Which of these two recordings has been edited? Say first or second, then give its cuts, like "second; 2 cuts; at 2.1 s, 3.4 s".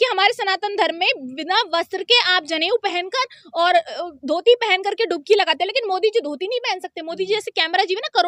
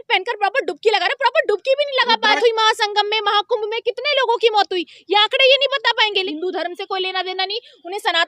second; 2 cuts; at 2.4 s, 6.2 s